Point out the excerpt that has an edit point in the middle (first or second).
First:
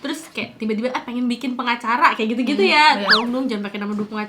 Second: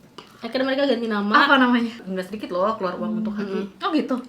second